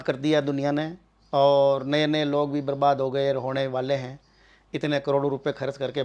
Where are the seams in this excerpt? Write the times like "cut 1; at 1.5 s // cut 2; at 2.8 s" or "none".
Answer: none